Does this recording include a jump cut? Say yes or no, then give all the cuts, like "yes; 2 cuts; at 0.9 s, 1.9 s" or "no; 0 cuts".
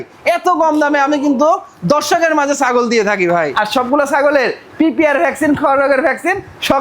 yes; 1 cut; at 3.5 s